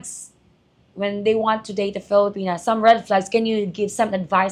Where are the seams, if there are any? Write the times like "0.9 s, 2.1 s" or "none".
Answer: none